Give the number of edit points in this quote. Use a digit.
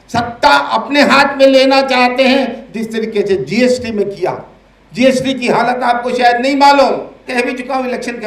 1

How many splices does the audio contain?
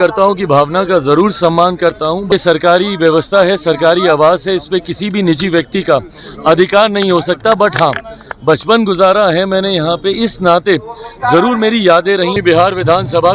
2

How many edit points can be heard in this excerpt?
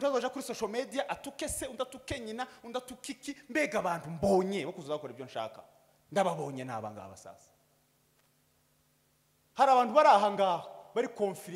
0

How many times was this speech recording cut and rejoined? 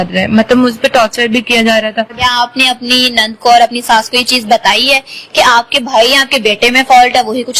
1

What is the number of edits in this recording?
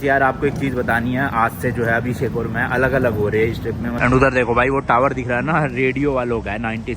1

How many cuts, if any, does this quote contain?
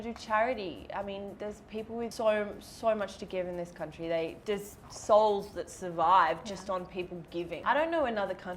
3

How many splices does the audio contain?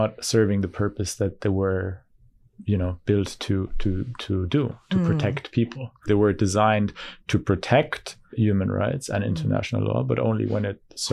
2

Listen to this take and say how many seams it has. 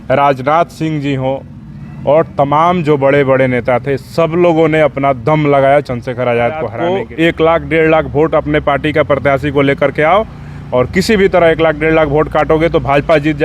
1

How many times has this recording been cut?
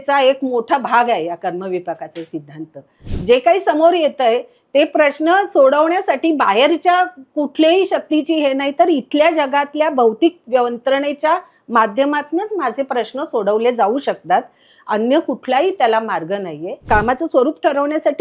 2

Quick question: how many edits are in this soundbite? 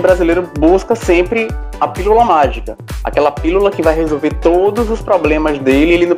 0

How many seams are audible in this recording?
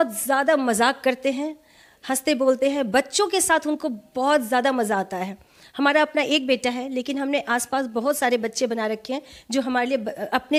0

